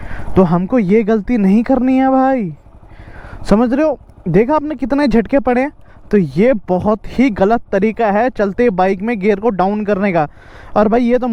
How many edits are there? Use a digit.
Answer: 0